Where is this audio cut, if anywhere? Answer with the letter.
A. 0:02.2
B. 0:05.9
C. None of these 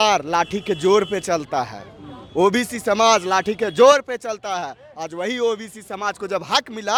C